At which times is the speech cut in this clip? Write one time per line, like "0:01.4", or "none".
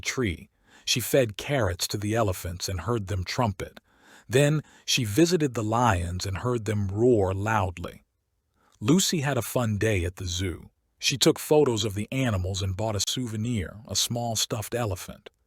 0:13.5